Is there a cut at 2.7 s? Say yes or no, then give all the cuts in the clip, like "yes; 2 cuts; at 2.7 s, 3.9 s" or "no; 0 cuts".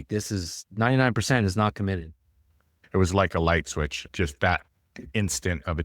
yes; 2 cuts; at 2.7 s, 4.0 s